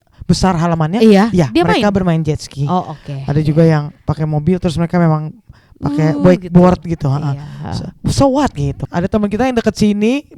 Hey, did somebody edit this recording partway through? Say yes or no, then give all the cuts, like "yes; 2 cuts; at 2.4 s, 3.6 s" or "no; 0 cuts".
yes; 1 cut; at 8.8 s